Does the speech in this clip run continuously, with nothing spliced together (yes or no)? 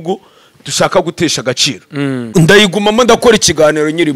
no